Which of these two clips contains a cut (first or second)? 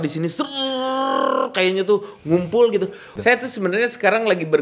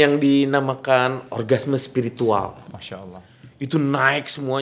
first